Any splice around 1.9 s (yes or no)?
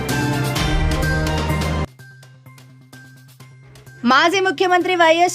no